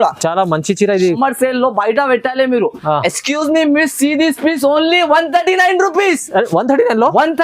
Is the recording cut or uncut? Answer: cut